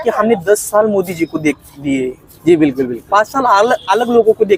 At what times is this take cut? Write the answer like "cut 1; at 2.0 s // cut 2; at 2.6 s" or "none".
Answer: none